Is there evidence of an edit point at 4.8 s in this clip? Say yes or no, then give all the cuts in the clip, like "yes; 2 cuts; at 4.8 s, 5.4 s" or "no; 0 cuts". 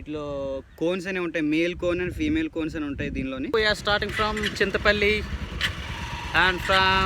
no; 1 cut; at 3.5 s